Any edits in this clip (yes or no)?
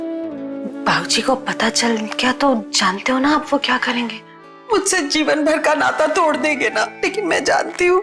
yes